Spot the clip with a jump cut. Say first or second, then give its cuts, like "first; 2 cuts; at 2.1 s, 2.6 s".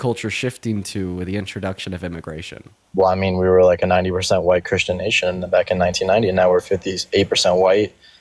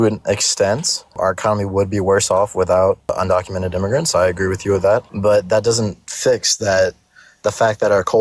second; 3 cuts; at 1.2 s, 3.1 s, 5.1 s